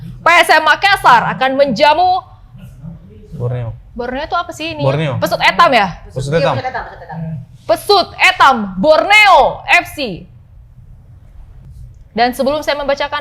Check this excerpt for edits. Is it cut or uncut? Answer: uncut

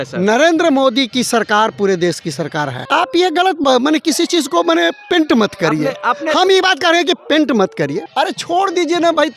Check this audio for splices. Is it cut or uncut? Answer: cut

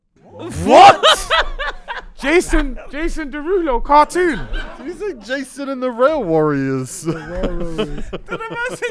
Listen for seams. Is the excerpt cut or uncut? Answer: cut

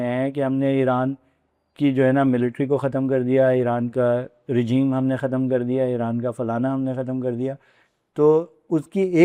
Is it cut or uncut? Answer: uncut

